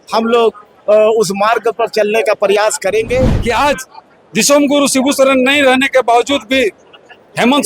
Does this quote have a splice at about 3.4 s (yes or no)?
yes